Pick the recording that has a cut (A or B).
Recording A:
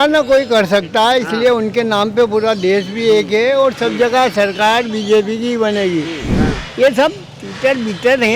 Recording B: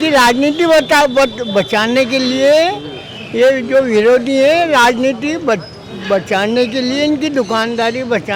A